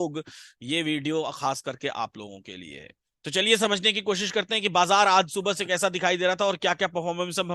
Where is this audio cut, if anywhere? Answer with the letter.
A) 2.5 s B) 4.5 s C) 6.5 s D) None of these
D